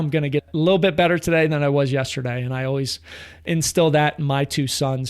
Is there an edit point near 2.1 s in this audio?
no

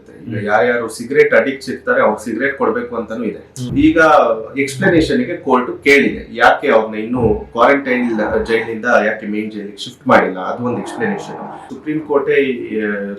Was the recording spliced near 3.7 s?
yes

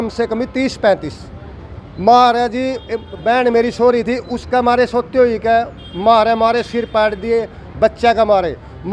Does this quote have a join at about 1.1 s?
no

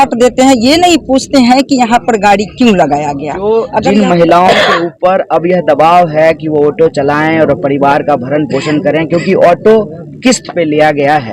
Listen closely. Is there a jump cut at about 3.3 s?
yes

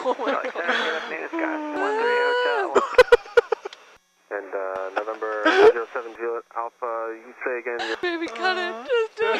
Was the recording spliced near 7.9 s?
yes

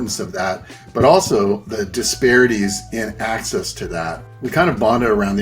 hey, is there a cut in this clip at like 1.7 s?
yes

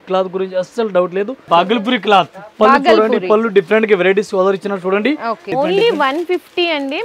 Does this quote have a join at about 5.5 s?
yes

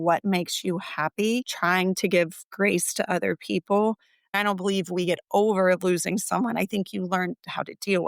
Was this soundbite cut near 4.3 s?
yes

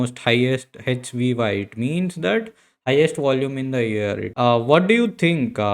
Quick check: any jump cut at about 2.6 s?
no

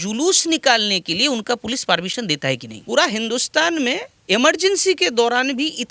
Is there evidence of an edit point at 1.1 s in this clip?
no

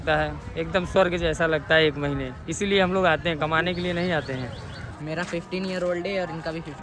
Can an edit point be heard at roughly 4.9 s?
yes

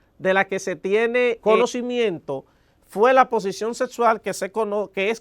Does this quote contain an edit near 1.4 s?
yes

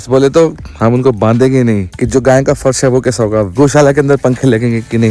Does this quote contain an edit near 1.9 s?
yes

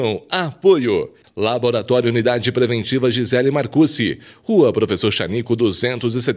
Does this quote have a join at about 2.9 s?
no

